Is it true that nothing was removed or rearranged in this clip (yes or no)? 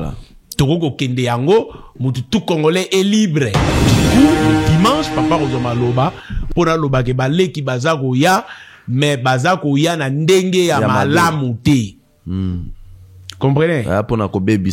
no